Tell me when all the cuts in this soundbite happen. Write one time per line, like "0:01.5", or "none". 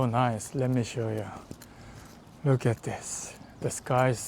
none